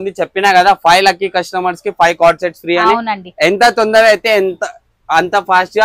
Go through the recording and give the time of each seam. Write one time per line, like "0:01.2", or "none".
none